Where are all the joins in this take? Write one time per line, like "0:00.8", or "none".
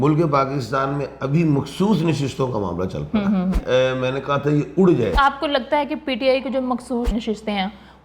0:03.6
0:05.1
0:07.1